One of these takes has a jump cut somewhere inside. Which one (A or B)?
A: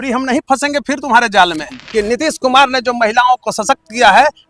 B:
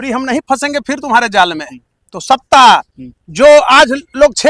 A